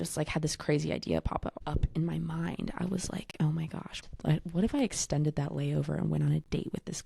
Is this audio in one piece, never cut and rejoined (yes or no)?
no